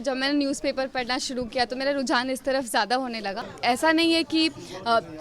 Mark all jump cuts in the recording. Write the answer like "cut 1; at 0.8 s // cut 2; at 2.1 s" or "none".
cut 1; at 3.5 s